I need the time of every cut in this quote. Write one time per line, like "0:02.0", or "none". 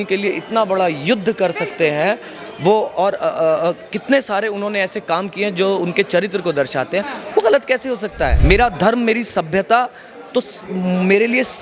0:08.4